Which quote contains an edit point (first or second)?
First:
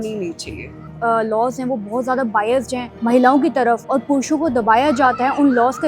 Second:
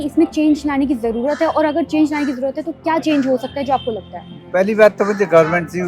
first